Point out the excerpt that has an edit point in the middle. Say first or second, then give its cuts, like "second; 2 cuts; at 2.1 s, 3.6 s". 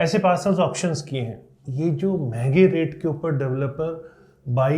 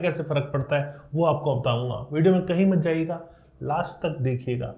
first; 1 cut; at 1.6 s